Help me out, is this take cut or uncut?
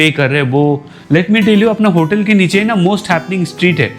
cut